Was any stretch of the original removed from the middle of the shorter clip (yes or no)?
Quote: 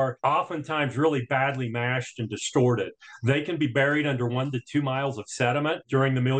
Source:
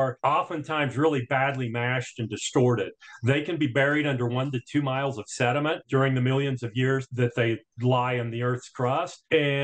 no